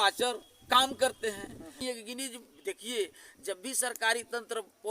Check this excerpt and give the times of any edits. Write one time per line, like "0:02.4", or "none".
0:01.8